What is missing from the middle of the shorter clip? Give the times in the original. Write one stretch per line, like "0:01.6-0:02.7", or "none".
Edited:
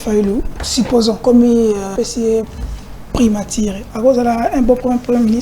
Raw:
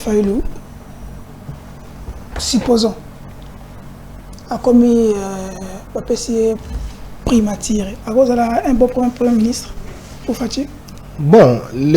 0:01.0-0:04.4
0:05.3-0:06.0